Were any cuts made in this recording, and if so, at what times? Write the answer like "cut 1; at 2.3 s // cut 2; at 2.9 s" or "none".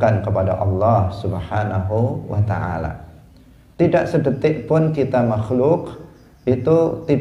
none